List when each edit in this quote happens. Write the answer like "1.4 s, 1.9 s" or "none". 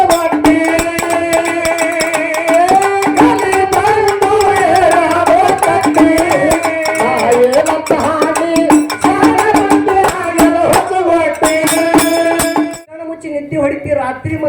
12.8 s